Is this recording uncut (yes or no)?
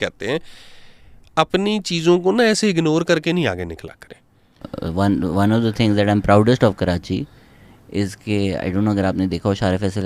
no